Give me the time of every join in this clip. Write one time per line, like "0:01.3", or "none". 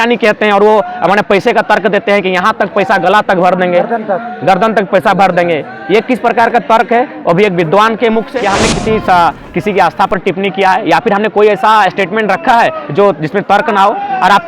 0:08.3